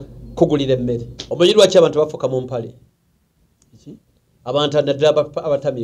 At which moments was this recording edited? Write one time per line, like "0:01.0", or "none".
0:01.2